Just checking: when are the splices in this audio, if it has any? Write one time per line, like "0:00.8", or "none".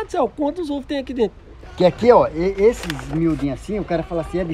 0:01.6